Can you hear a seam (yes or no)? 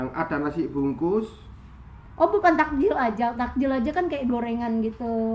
no